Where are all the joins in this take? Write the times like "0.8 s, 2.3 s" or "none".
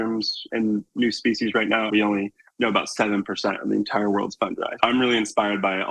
1.9 s, 4.7 s